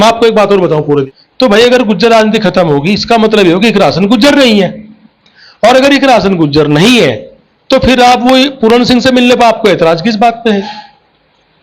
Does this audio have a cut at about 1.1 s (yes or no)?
yes